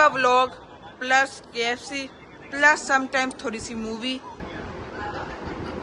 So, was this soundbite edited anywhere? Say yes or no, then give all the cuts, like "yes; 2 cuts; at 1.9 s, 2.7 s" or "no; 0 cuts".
yes; 1 cut; at 4.4 s